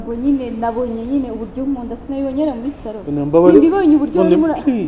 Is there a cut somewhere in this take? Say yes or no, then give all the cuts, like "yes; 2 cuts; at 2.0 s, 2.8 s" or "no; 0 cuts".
no; 0 cuts